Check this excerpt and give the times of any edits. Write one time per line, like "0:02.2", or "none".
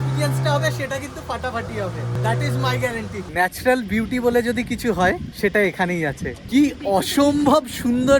0:02.2
0:03.2
0:05.3
0:06.3